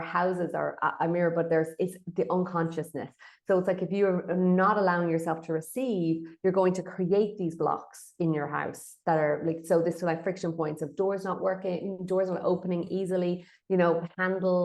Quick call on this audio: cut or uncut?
uncut